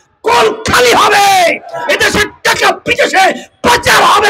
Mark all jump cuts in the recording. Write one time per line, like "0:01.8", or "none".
none